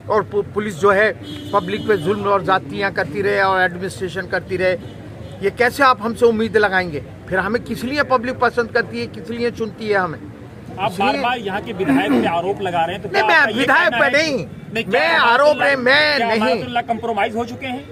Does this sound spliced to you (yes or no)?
no